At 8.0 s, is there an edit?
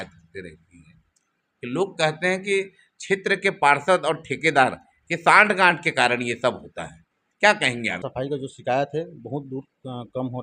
yes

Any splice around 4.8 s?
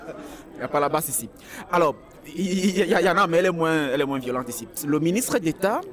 yes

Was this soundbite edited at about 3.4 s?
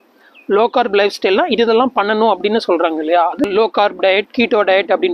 yes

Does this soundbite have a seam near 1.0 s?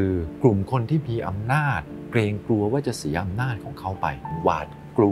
no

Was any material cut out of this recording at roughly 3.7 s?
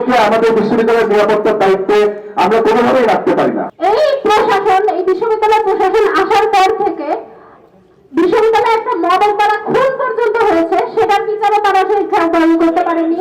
yes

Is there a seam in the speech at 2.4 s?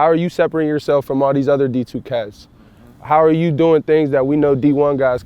no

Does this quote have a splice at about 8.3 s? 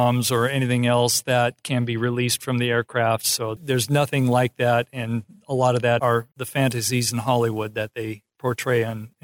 no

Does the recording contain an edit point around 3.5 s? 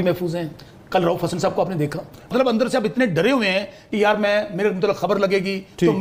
no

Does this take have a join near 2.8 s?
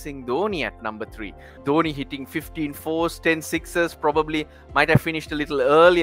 no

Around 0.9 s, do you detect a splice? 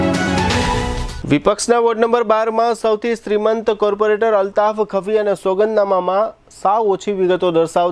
yes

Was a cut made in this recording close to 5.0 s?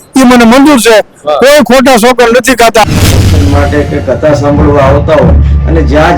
no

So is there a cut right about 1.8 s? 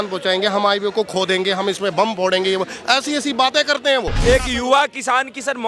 no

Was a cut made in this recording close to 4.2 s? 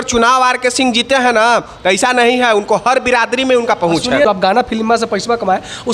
yes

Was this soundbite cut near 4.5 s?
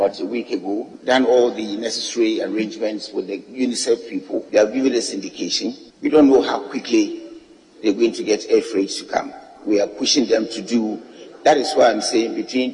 yes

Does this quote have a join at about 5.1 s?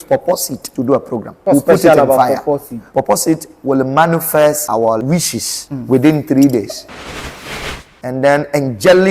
yes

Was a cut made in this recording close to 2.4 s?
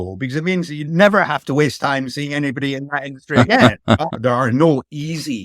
no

